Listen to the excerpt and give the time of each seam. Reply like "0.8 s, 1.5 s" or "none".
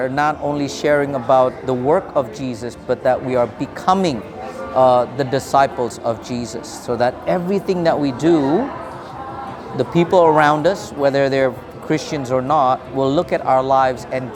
none